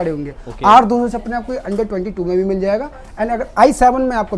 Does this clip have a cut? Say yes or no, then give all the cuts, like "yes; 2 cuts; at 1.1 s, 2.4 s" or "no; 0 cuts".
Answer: no; 0 cuts